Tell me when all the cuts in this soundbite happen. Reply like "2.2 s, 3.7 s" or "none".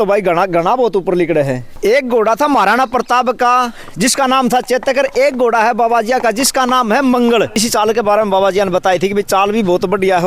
1.7 s, 7.6 s